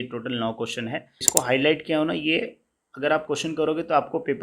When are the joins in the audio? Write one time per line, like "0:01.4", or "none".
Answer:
0:01.2